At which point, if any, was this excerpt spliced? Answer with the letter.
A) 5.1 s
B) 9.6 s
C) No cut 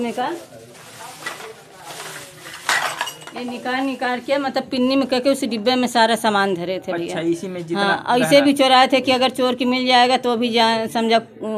C